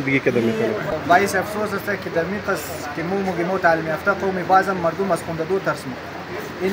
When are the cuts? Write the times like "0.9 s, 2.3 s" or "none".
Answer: 0.9 s